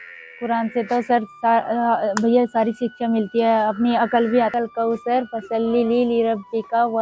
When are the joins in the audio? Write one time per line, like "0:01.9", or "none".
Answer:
0:04.5